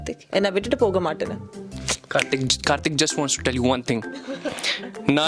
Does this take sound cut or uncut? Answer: uncut